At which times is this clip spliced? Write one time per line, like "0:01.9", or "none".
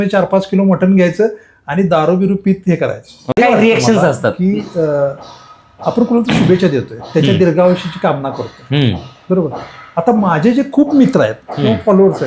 0:03.3